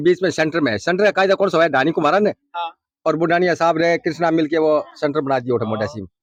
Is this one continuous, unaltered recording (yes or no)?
yes